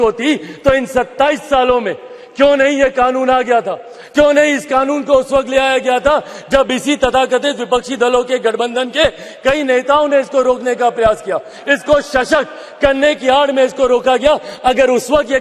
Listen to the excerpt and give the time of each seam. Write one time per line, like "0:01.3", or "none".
none

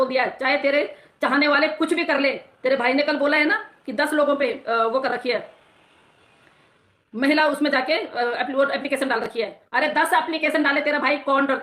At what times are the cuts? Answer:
none

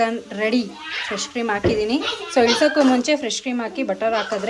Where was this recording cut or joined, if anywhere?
none

